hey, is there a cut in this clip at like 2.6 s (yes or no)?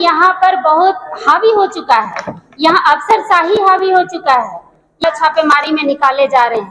no